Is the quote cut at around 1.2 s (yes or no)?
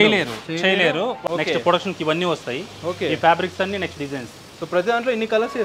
yes